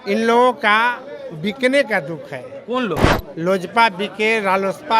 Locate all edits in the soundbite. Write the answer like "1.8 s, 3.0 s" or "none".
3.0 s